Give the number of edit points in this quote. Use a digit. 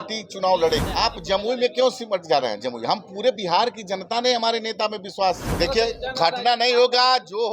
2